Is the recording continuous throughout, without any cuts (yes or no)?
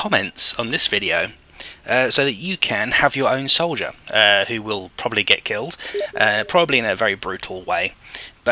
no